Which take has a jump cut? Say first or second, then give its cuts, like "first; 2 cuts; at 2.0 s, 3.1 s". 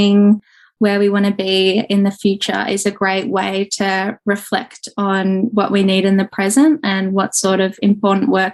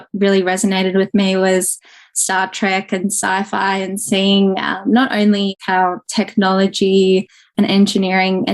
second; 1 cut; at 5.6 s